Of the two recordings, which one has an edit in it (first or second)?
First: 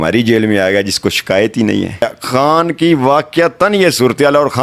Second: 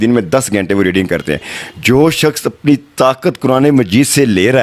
first